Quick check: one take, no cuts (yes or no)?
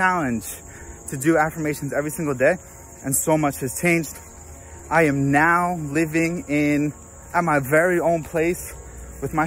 yes